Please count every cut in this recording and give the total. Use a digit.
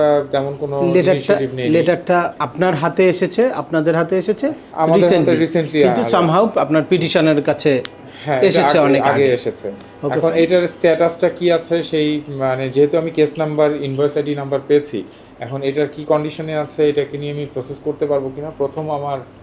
0